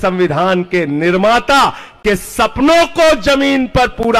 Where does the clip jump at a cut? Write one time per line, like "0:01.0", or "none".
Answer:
none